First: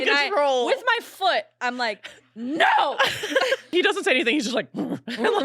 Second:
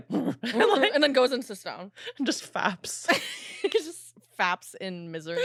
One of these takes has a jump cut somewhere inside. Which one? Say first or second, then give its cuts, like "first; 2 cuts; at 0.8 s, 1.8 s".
first; 1 cut; at 3.7 s